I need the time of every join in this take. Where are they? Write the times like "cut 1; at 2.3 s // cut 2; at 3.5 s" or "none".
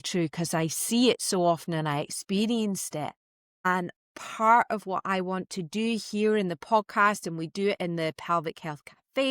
none